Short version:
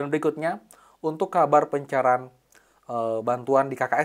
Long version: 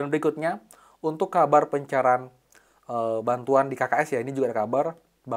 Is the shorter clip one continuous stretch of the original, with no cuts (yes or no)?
yes